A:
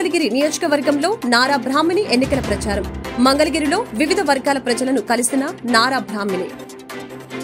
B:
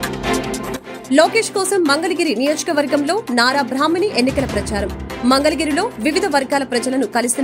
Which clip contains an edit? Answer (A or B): B